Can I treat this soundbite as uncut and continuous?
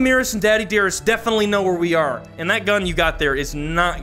yes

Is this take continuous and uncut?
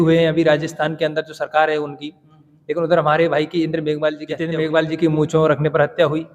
no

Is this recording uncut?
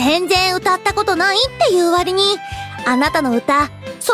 yes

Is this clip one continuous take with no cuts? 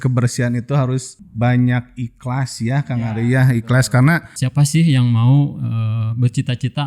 no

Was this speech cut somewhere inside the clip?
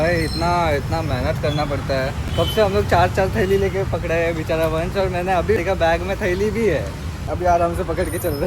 yes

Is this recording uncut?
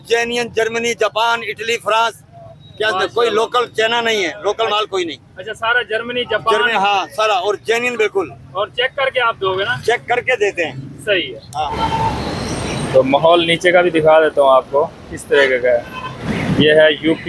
no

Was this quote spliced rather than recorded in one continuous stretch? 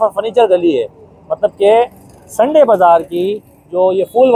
no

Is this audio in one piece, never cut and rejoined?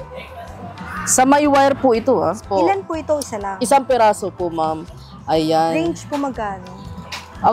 yes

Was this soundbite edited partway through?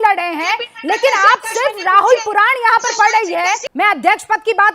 yes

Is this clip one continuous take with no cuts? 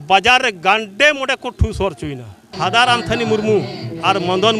no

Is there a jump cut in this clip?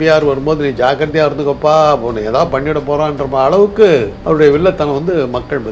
yes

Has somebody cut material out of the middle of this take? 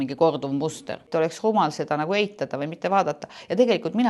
yes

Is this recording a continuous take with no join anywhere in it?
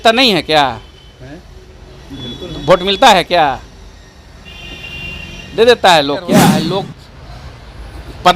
no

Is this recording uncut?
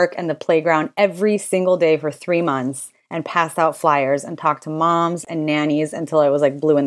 yes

